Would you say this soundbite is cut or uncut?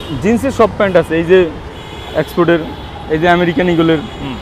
uncut